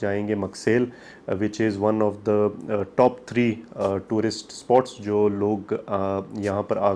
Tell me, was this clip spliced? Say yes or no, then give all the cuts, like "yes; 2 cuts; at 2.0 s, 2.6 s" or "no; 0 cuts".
no; 0 cuts